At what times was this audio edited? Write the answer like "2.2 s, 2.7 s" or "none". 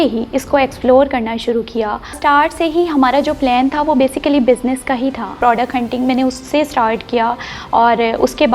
2.2 s, 5.4 s